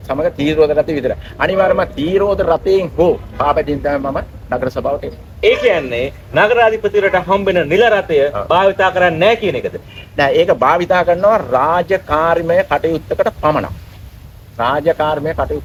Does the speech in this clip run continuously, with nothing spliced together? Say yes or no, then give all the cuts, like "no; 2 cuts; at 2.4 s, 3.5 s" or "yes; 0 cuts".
yes; 0 cuts